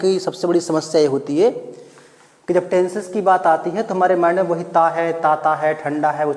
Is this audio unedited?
yes; 0 cuts

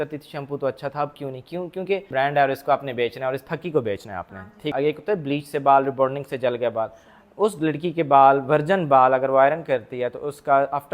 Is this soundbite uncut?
no; 2 cuts; at 2.1 s, 4.7 s

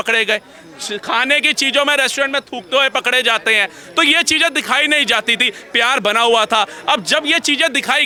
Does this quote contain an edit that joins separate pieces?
no; 0 cuts

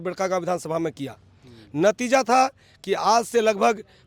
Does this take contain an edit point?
no; 0 cuts

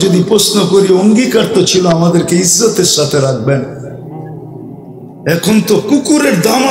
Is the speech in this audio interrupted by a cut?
yes; 2 cuts; at 3.8 s, 5.2 s

